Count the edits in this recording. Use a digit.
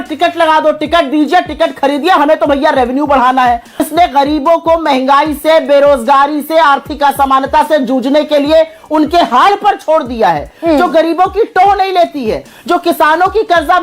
1